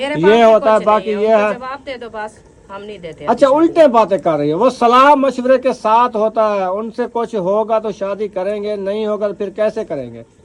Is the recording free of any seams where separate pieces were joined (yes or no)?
yes